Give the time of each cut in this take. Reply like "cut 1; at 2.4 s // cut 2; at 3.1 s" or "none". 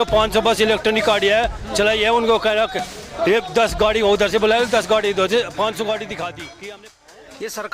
cut 1; at 6.7 s